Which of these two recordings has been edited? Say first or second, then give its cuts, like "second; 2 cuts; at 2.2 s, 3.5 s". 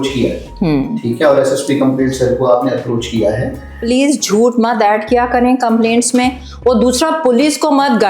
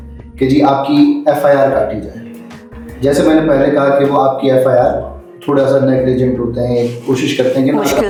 first; 1 cut; at 3.8 s